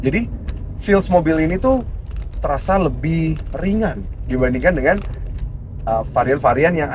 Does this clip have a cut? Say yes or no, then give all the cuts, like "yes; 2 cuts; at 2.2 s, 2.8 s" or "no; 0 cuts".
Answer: no; 0 cuts